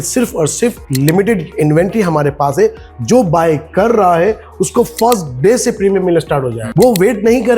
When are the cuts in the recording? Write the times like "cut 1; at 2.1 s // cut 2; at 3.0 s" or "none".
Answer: cut 1; at 6.6 s